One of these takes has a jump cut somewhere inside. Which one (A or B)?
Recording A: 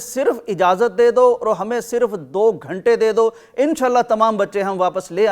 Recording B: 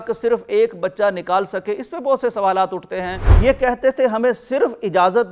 B